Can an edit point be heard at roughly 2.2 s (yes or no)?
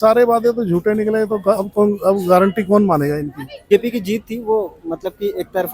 no